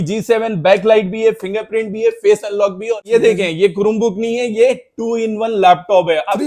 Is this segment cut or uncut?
cut